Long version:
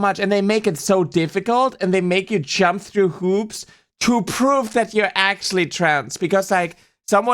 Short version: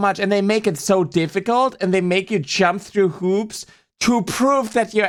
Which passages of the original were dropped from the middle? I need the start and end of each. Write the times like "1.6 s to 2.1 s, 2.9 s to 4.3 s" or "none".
none